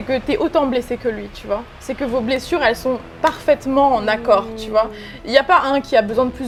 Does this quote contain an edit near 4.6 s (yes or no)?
no